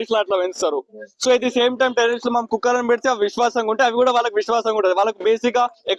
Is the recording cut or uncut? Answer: uncut